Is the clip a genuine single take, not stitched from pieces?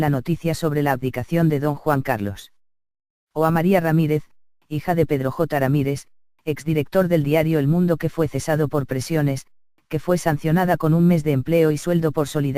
no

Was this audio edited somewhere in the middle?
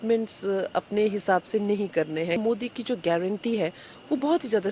yes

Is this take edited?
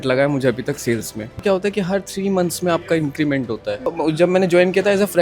yes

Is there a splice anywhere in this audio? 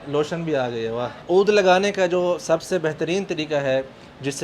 yes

